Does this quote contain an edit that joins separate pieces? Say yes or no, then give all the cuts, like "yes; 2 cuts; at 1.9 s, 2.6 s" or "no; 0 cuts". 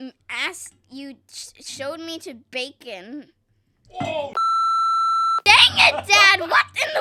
no; 0 cuts